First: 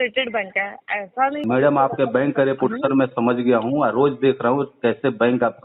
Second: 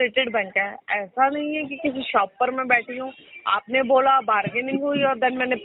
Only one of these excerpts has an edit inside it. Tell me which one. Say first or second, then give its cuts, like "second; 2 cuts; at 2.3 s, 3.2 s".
first; 1 cut; at 1.4 s